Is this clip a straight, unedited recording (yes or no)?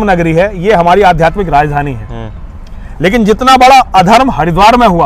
yes